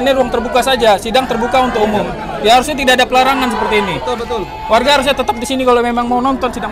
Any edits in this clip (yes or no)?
no